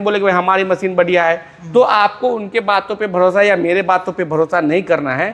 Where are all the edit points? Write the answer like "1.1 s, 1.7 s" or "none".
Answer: none

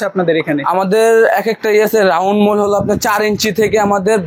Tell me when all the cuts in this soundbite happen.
none

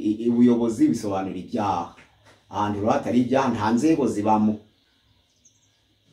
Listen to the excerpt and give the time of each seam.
none

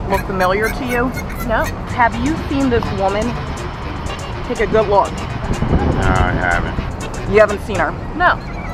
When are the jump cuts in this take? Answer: none

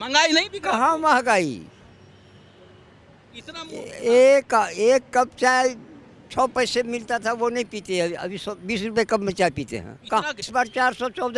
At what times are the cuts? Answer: 10.4 s

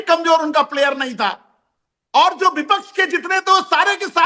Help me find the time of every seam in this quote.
none

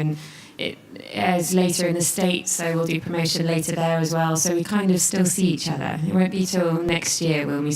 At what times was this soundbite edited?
1.8 s

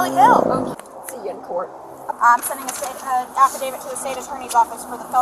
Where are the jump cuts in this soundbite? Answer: 0.7 s, 2.1 s

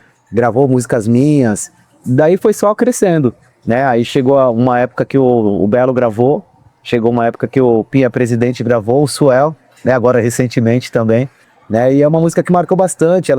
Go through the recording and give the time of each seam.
11.4 s

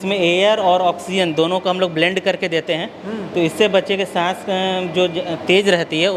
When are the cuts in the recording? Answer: none

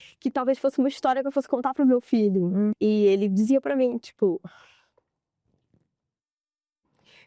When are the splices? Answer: 2.7 s

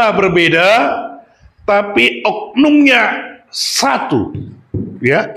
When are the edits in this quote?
none

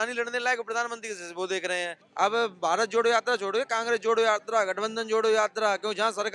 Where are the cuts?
2.0 s

